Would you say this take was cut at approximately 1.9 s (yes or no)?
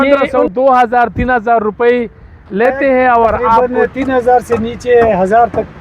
no